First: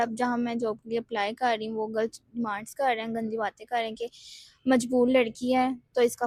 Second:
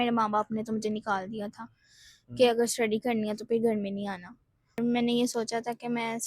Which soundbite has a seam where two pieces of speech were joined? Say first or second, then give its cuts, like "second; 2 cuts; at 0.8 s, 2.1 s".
second; 1 cut; at 4.8 s